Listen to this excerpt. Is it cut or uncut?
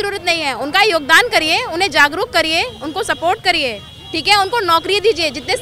uncut